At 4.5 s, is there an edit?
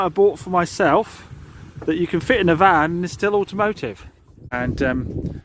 yes; 1 cut; at 4.5 s

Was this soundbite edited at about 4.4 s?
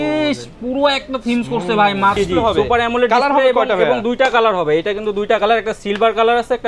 no; 1 cut; at 2.2 s

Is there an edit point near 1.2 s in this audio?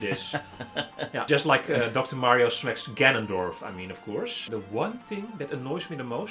yes; 2 cuts; at 1.2 s, 4.5 s

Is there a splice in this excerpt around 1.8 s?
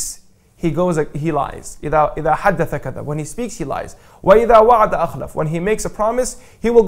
no; 0 cuts

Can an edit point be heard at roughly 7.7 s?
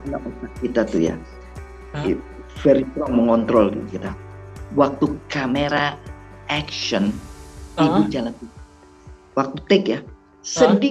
no; 0 cuts

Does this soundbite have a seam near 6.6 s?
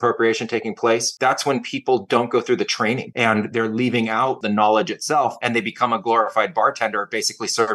no; 4 cuts; at 1.1 s, 3.1 s, 4.4 s, 5.4 s

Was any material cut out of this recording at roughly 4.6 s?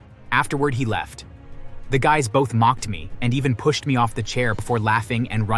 yes; 1 cut; at 4.6 s

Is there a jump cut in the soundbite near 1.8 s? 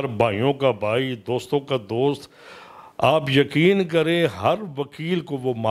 no; 0 cuts

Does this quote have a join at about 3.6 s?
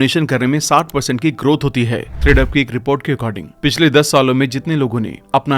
no; 1 cut; at 2.1 s

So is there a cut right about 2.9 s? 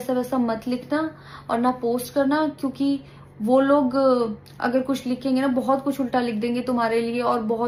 no; 0 cuts

